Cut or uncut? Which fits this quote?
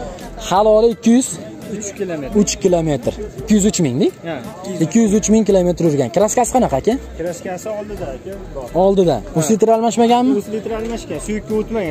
uncut